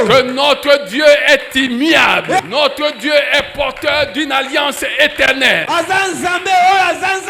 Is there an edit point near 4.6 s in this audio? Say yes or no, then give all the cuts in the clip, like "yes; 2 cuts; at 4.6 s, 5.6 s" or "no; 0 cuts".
no; 0 cuts